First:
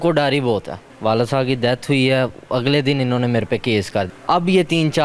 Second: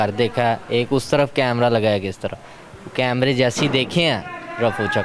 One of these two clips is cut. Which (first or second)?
first